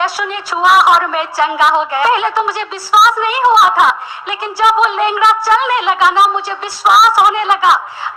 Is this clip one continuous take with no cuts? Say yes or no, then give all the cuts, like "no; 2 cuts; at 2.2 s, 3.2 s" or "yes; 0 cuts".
no; 1 cut; at 2.1 s